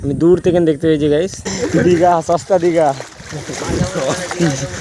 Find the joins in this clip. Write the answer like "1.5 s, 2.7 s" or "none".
1.5 s